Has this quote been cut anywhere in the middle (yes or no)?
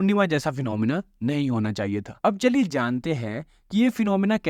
yes